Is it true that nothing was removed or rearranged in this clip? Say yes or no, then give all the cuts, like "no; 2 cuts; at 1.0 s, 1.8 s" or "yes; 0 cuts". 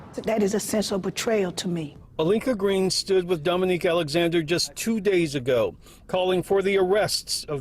no; 1 cut; at 5.7 s